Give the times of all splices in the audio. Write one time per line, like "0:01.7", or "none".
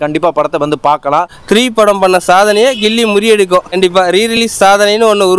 0:01.3
0:03.8